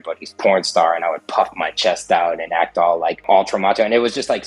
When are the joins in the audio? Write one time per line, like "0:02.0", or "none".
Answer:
0:03.2